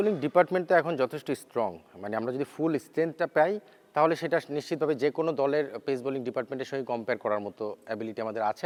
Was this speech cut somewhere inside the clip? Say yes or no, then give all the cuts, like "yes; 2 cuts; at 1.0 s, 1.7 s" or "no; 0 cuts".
no; 0 cuts